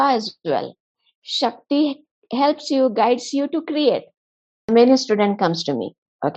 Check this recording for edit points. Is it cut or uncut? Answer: cut